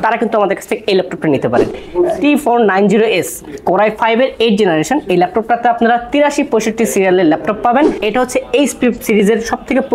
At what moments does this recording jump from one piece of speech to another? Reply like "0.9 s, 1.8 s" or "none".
1.8 s, 8.0 s